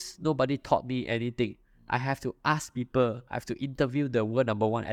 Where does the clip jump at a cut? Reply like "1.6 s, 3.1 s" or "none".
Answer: none